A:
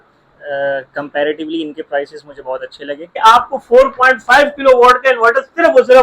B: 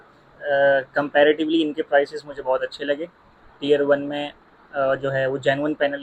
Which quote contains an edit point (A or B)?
A